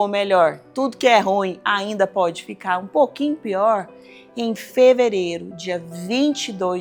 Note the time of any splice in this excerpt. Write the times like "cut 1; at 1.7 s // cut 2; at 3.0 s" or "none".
none